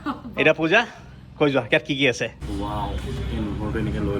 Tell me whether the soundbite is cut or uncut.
cut